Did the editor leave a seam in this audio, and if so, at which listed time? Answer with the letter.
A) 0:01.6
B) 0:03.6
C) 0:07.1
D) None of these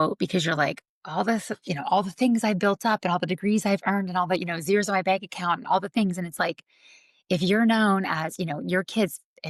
D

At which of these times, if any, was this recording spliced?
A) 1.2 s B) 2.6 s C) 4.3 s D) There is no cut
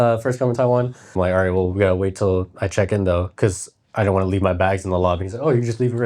A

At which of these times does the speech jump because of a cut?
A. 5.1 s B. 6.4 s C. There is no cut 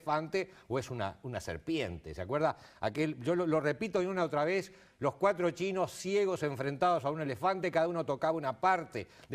C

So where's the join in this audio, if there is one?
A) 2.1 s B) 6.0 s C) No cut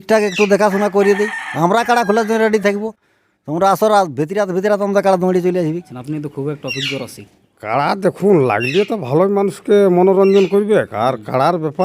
B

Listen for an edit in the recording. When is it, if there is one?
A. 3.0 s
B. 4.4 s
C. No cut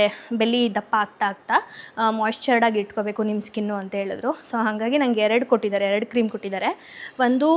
C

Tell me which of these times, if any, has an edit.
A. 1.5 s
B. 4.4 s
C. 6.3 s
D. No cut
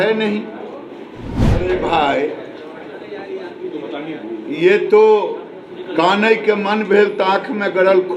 A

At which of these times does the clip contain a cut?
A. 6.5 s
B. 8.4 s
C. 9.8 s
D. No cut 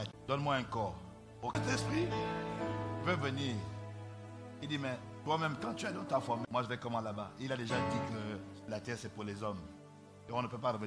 A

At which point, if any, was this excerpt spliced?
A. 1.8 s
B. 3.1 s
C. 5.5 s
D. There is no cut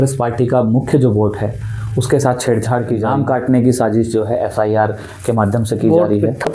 B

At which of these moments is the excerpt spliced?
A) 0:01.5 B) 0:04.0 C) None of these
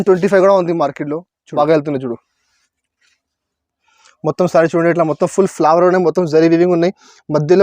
A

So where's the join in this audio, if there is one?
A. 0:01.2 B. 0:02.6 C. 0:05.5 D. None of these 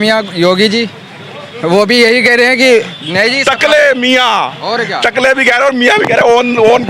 D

